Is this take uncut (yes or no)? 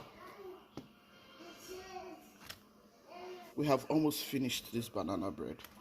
no